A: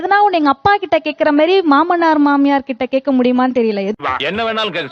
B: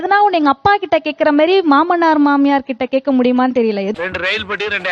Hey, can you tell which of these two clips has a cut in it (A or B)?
B